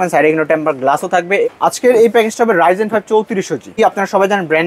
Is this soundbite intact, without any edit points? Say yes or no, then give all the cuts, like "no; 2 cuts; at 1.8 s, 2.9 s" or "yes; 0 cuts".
no; 2 cuts; at 1.5 s, 3.8 s